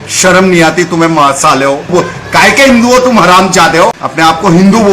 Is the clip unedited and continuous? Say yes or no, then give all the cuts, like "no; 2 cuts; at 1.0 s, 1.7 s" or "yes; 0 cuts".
no; 2 cuts; at 1.9 s, 4.0 s